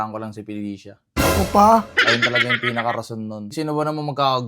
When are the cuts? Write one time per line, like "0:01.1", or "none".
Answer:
0:03.5